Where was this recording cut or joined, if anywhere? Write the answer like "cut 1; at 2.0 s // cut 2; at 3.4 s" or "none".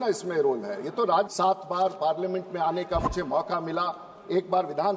cut 1; at 1.3 s